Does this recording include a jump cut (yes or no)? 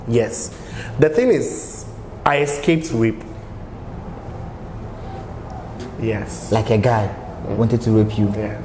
yes